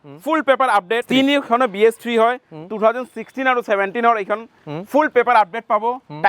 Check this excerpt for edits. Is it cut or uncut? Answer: cut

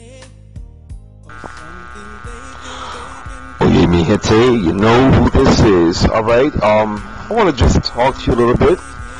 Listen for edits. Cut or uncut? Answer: cut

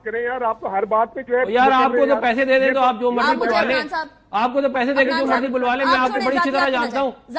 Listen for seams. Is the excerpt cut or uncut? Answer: uncut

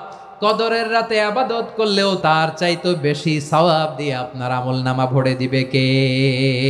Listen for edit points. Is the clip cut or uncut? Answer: cut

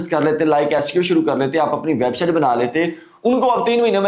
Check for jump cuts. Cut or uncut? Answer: uncut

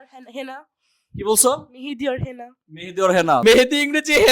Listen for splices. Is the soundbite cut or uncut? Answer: cut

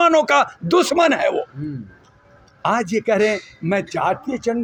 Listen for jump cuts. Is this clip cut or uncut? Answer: uncut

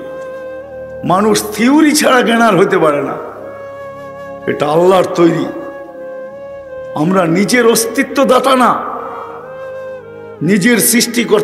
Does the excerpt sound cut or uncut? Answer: cut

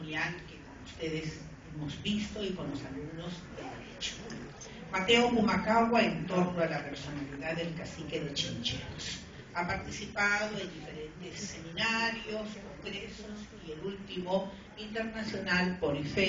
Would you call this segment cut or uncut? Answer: uncut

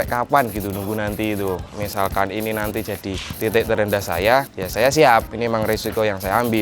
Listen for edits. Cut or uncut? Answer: cut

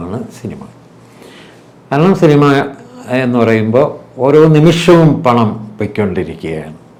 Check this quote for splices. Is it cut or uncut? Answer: uncut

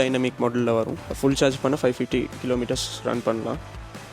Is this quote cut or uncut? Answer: cut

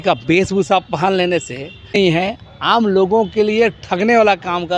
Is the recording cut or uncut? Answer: cut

